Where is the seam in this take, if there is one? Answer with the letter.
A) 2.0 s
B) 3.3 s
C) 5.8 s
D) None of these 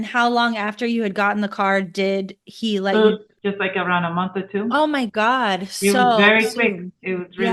B